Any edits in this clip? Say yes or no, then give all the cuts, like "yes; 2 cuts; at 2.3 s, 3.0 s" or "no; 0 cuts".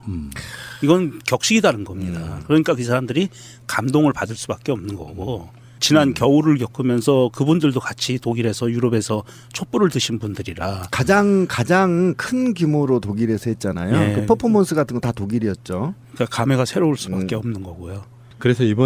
yes; 1 cut; at 2.3 s